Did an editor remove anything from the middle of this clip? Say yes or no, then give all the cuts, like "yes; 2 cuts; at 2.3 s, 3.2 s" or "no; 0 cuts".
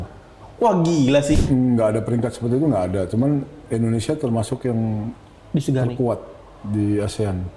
yes; 1 cut; at 1.4 s